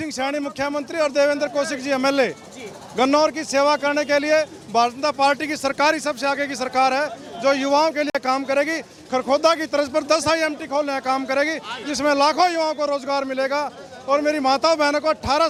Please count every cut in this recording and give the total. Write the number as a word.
zero